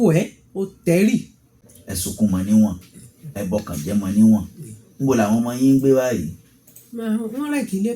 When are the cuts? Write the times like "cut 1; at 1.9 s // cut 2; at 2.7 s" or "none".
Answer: cut 1; at 1.6 s